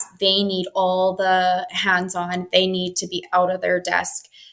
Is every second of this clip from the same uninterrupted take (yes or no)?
yes